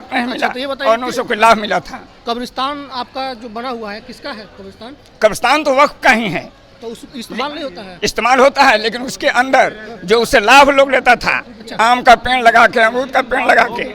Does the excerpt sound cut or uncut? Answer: uncut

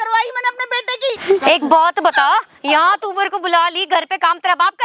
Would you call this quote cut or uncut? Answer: cut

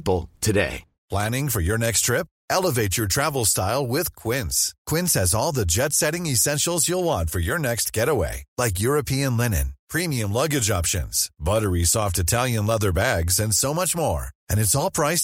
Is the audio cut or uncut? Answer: cut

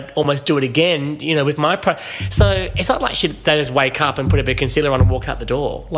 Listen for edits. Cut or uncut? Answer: uncut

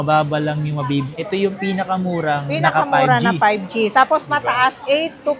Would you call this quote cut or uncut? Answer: cut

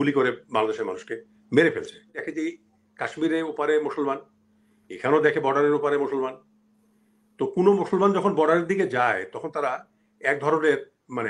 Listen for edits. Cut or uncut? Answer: cut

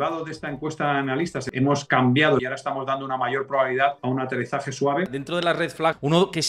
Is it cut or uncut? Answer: cut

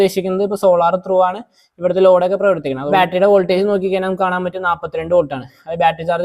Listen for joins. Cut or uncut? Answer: cut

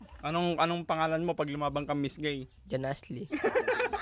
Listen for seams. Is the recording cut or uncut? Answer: cut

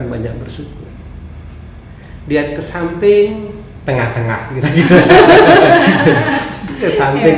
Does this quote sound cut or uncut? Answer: uncut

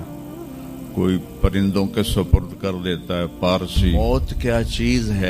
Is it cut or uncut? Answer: cut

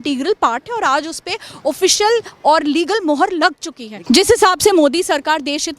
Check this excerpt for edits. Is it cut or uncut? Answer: cut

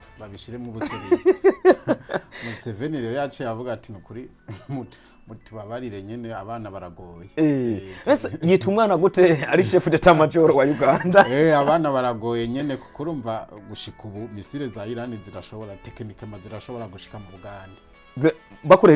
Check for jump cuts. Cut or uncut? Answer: uncut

